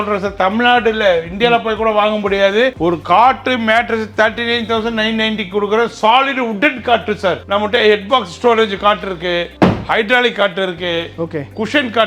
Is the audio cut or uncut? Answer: cut